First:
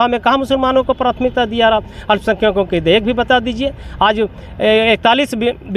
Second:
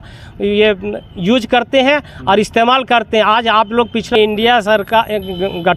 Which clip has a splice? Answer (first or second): second